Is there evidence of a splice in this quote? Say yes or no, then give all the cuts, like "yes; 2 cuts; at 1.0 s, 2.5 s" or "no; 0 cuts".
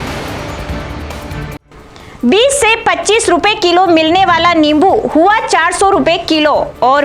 yes; 1 cut; at 1.6 s